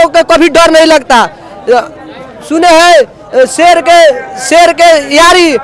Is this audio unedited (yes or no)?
yes